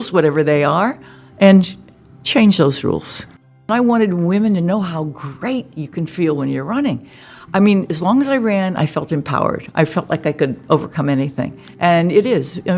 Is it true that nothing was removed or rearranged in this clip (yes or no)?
no